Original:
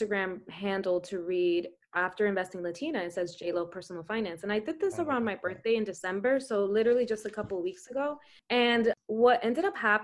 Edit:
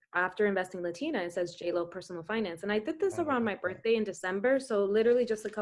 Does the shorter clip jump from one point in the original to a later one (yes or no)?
no